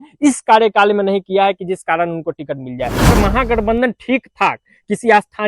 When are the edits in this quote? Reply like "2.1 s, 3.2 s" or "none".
3.1 s